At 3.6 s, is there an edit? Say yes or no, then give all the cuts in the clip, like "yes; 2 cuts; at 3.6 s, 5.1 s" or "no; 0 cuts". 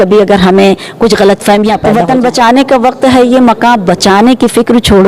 no; 1 cut; at 1.8 s